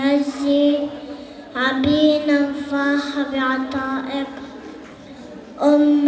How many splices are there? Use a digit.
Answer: 1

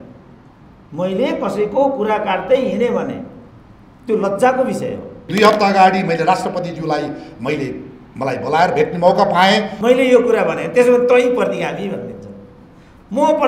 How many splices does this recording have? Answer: 2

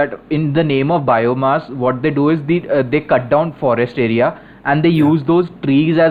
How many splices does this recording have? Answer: 0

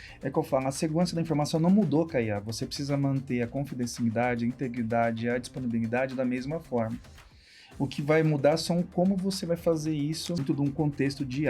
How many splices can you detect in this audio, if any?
1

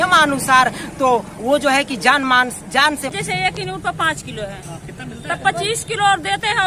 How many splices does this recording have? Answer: 1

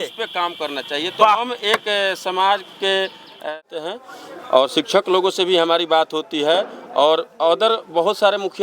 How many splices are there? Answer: 1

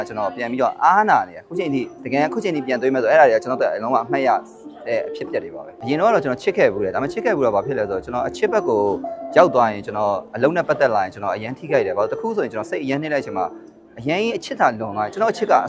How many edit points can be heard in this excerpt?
1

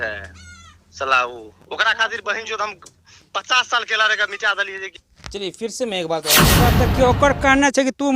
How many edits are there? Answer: 1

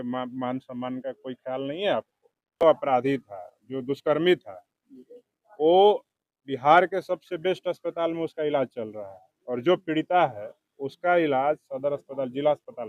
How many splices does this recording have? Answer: 1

